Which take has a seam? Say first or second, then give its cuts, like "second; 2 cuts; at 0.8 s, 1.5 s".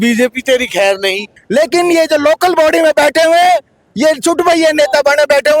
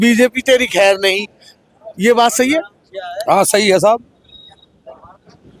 first; 1 cut; at 1.4 s